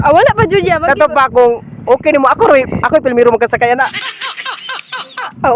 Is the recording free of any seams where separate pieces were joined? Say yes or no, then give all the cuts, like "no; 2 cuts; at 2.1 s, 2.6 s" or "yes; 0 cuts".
yes; 0 cuts